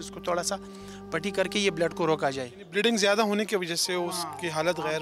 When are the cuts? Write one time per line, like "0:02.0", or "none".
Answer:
0:02.6